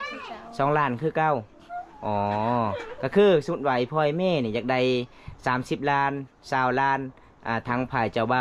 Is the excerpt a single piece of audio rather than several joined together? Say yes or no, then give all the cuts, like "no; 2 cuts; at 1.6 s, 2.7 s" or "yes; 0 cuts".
yes; 0 cuts